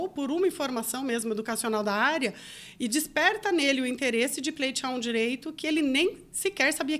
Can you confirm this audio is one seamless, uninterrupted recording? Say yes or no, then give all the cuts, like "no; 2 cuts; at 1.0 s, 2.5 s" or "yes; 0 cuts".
yes; 0 cuts